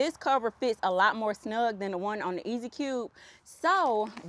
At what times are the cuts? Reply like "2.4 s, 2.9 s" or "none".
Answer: none